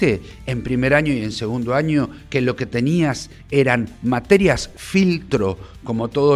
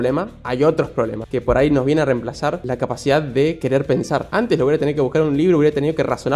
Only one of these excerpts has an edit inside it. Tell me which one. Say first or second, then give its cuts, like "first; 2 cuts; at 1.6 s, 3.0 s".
second; 3 cuts; at 1.2 s, 2.6 s, 3.7 s